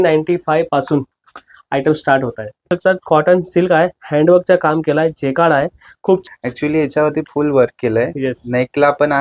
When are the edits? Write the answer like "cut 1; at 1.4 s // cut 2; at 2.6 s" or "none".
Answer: cut 1; at 2.7 s // cut 2; at 6.2 s